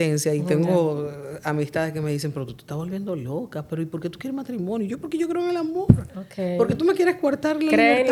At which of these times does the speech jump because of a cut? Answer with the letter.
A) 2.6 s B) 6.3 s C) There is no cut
C